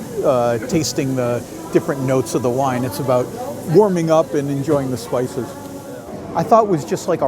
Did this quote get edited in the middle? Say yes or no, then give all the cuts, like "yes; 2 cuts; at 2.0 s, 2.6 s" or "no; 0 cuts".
yes; 1 cut; at 6.2 s